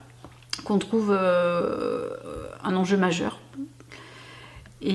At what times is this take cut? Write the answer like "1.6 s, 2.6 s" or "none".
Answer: none